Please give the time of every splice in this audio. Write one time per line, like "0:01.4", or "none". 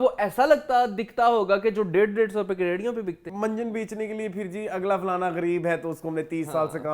0:03.3